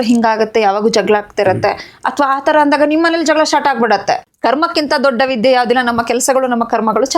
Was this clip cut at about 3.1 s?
no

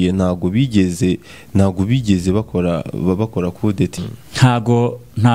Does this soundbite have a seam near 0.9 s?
no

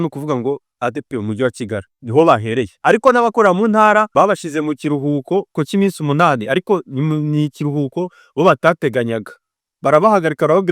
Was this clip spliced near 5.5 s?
yes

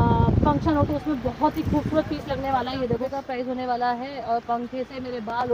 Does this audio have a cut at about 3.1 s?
yes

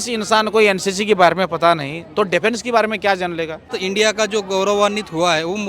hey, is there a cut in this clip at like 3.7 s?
yes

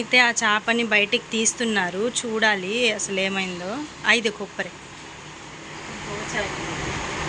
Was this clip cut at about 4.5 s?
no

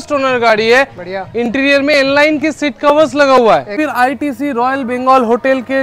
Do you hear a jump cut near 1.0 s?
no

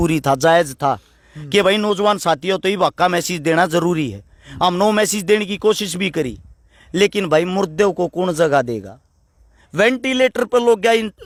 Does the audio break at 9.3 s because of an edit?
no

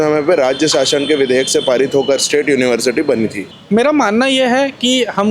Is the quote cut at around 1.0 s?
no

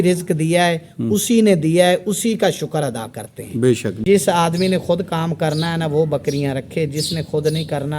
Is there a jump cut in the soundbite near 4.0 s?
yes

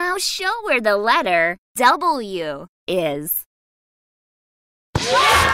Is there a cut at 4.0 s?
no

